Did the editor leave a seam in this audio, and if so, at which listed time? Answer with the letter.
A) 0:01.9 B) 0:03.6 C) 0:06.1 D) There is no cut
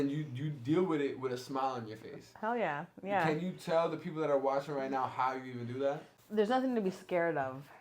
C